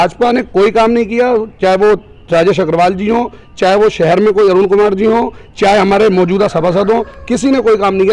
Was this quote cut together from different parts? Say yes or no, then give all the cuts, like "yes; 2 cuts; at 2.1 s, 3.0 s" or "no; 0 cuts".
no; 0 cuts